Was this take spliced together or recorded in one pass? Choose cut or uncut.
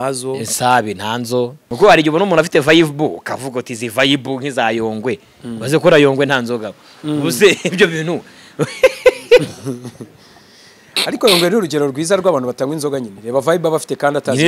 cut